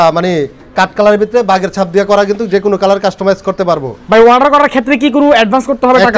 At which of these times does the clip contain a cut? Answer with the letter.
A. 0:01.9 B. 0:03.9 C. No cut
B